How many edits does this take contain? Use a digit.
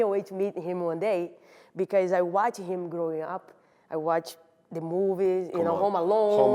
0